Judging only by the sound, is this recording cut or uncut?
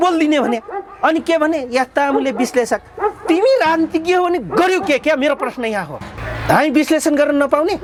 uncut